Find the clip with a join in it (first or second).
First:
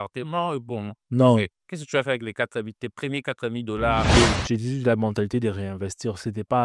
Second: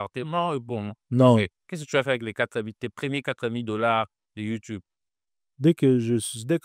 first